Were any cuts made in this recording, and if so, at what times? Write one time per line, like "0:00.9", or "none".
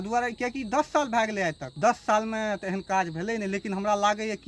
0:01.6

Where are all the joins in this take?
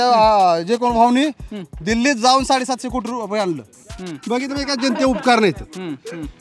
0:03.8

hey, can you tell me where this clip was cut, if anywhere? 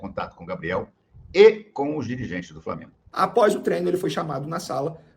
0:03.0

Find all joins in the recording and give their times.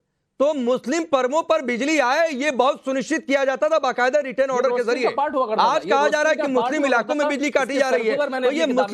0:07.5

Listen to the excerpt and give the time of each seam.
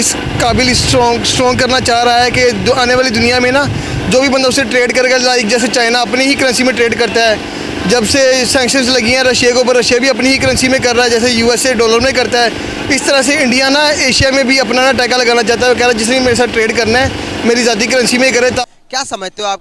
0:18.6

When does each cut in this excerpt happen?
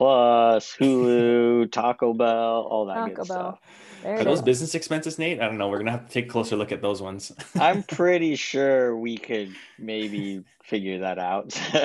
none

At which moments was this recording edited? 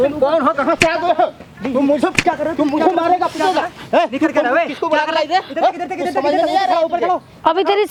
none

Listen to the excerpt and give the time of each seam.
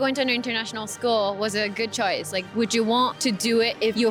none

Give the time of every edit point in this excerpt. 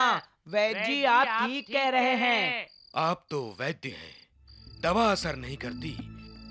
none

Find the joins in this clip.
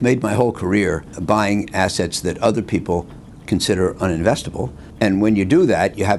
none

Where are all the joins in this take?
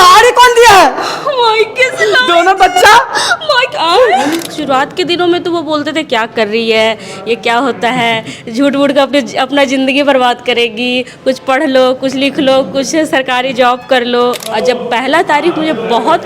0:04.5
0:14.5

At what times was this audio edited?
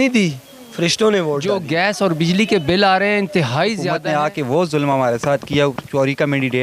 0:01.6
0:03.9

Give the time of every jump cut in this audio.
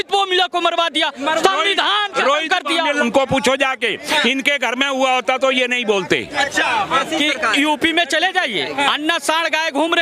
0:03.0
0:07.0

